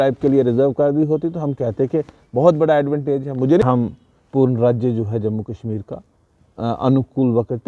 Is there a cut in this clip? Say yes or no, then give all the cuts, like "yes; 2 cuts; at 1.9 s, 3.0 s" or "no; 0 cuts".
yes; 1 cut; at 3.6 s